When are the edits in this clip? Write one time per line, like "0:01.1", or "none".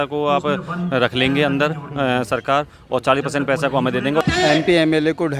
0:04.2